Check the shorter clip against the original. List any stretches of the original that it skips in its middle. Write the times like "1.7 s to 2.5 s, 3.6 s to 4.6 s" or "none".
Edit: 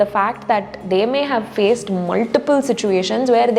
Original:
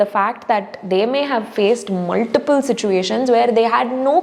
none